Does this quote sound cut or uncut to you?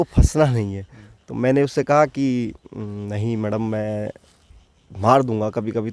uncut